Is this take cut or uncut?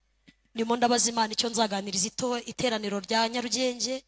uncut